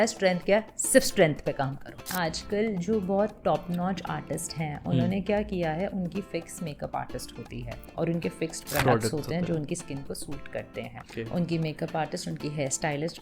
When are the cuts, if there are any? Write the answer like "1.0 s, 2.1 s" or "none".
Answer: 2.1 s, 7.8 s, 11.0 s

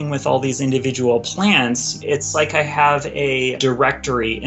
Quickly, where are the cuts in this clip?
2.0 s, 3.6 s

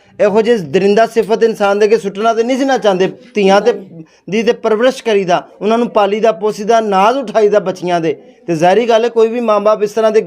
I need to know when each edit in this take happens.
none

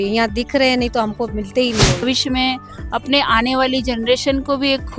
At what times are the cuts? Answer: 2.0 s

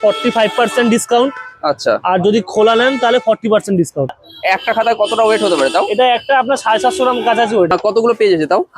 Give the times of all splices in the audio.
4.3 s, 7.7 s

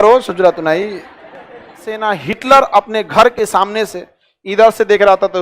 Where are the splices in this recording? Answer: 2.0 s

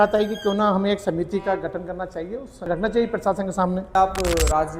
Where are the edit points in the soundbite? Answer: 2.6 s, 3.9 s

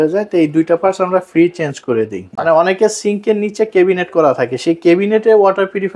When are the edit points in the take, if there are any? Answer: 2.2 s

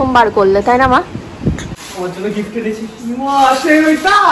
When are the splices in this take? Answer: 1.8 s

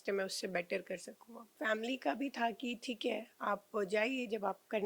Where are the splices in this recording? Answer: 1.5 s

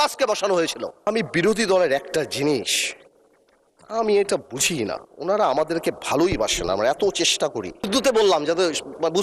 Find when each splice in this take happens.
1.0 s, 7.9 s

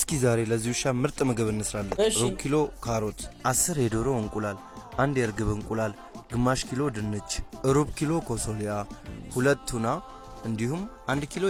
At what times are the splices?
none

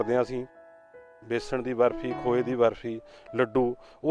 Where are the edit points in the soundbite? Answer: 1.1 s

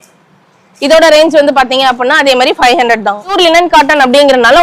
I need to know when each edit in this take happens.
3.3 s

